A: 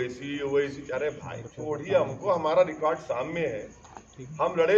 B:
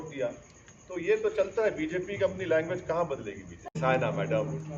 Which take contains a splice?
B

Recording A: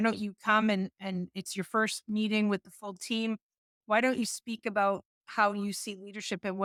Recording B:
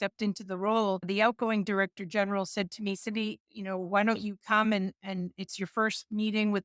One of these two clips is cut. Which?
B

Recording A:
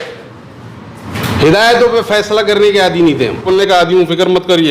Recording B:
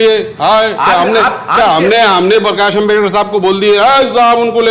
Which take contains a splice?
A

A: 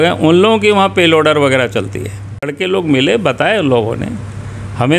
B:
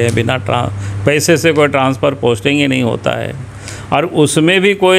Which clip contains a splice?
A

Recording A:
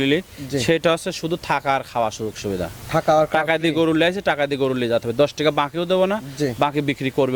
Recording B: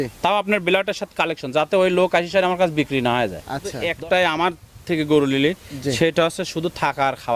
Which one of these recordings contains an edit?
B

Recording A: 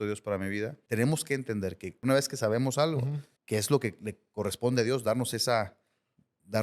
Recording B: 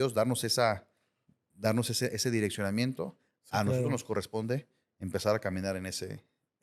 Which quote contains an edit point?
A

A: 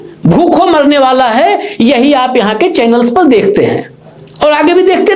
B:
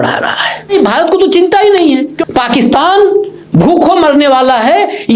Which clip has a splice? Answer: B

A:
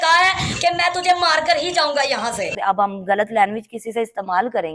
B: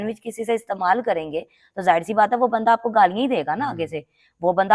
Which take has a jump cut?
A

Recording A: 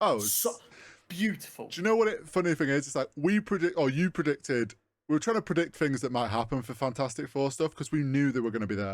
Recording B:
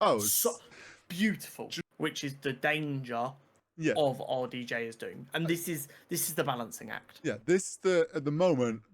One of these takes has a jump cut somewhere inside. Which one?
B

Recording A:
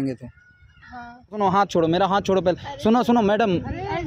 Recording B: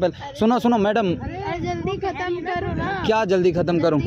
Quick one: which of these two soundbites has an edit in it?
A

